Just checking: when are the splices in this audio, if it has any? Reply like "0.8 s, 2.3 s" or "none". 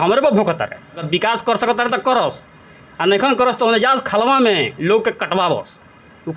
1.0 s